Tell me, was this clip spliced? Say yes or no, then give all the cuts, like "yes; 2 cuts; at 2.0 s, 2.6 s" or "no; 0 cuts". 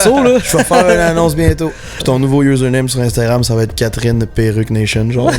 yes; 1 cut; at 1.9 s